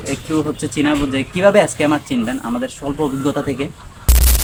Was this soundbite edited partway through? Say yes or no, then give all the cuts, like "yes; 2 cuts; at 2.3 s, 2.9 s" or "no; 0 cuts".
no; 0 cuts